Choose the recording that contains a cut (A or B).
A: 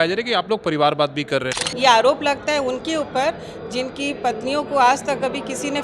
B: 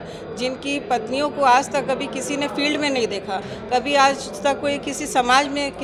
A